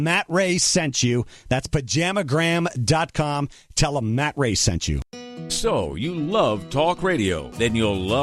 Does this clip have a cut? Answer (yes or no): yes